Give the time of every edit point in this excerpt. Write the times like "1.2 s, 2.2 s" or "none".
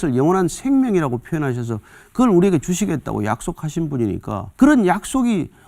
4.5 s